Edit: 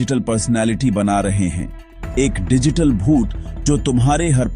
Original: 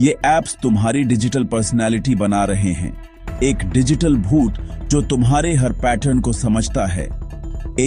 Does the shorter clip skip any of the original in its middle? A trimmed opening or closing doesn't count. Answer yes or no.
no